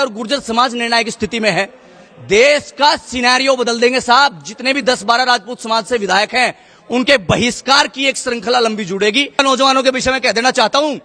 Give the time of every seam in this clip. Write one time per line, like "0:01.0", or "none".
0:09.3